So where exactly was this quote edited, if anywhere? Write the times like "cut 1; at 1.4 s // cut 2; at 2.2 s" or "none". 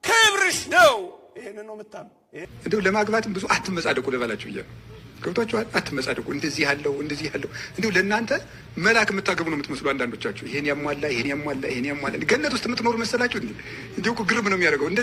cut 1; at 2.5 s